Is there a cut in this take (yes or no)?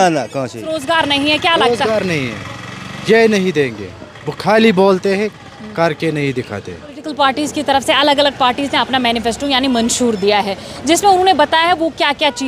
yes